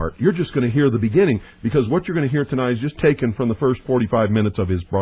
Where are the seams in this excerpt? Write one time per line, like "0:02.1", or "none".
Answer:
0:01.6

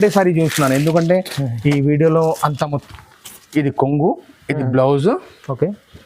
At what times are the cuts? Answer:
0:02.8

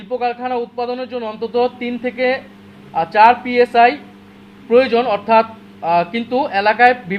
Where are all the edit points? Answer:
none

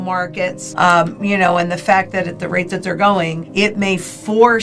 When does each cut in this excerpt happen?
0:03.4

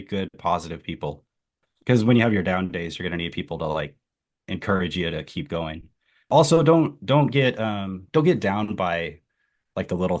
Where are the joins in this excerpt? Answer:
0:01.5
0:06.3

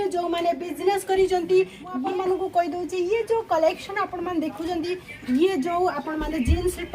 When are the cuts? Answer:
0:02.0

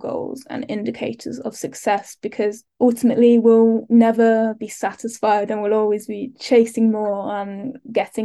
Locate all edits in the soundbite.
none

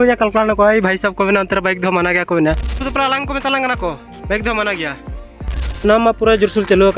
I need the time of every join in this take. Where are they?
0:02.8
0:05.8

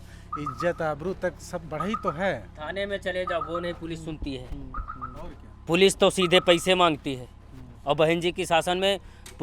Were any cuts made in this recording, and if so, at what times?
none

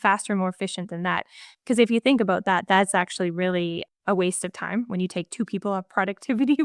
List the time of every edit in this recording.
0:03.9

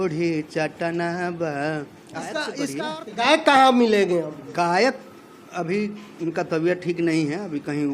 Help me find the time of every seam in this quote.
0:02.7

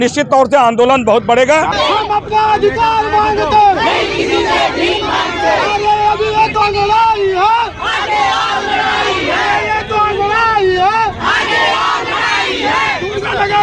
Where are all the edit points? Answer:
0:01.7

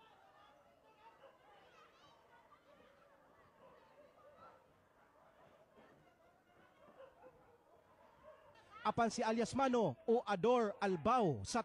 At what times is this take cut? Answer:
none

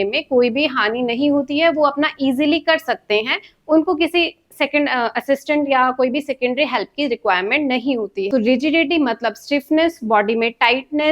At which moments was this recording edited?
0:08.3

